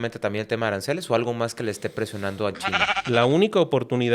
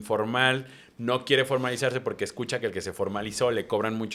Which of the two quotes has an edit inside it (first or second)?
first